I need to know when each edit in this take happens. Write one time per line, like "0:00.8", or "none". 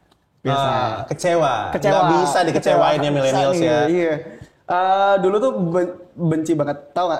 none